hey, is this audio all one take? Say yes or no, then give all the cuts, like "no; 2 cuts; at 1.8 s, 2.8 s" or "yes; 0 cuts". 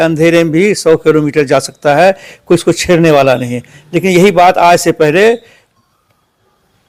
yes; 0 cuts